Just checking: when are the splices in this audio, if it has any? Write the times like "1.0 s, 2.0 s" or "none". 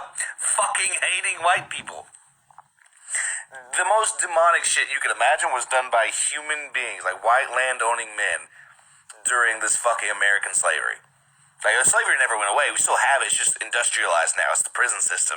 8.1 s, 10.9 s